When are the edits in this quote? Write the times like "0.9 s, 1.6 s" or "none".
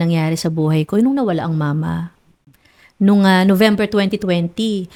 none